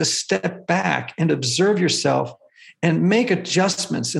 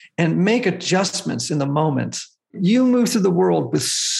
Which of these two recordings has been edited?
second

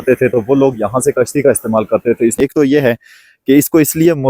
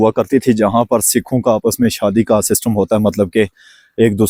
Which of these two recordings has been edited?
first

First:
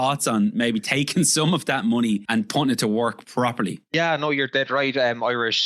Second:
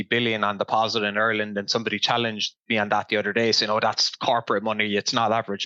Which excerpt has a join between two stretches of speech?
first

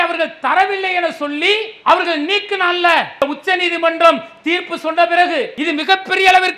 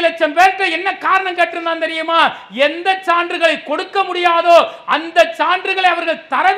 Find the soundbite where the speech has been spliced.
first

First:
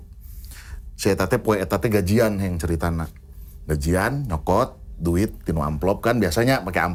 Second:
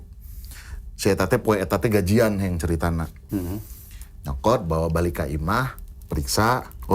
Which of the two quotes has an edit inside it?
second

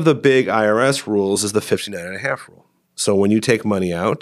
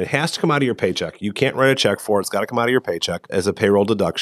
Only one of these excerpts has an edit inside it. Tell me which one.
second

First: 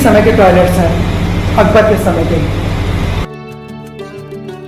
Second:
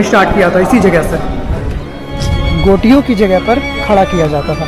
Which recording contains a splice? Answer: second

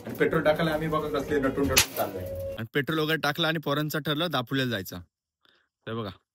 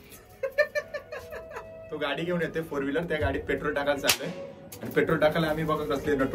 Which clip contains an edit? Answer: first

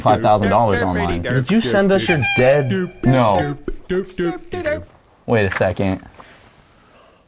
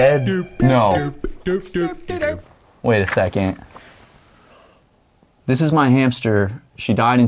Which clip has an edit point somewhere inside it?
first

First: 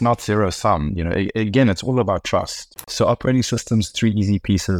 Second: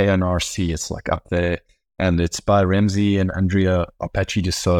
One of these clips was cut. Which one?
first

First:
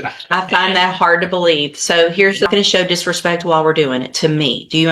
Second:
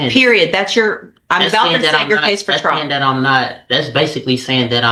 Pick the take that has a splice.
first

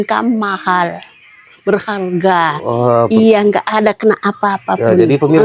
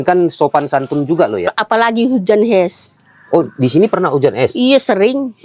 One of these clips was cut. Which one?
second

